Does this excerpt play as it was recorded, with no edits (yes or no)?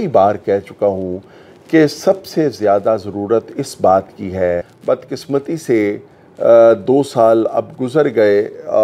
no